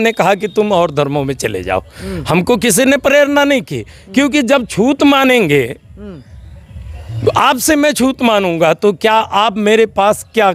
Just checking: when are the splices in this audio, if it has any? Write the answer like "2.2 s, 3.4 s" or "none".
none